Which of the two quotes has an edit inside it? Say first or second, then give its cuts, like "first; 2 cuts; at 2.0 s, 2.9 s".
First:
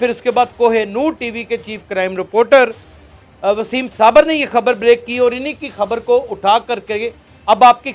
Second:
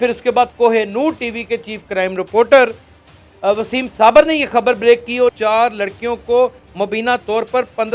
second; 1 cut; at 5.4 s